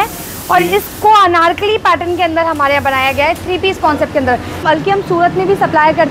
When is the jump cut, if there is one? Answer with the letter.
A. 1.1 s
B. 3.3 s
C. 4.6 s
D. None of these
C